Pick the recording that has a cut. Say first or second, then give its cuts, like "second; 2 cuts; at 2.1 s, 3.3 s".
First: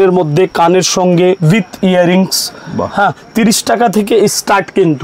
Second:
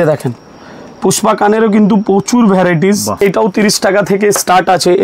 second; 1 cut; at 3.2 s